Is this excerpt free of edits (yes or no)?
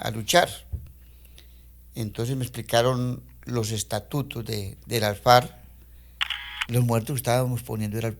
no